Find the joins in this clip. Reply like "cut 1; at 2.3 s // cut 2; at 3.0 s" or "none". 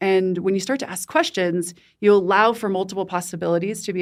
none